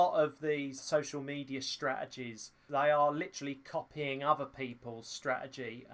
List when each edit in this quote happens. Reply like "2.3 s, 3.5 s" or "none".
0.8 s, 2.5 s